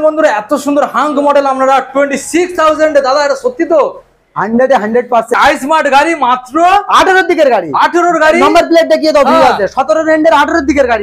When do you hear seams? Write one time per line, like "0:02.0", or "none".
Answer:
0:05.4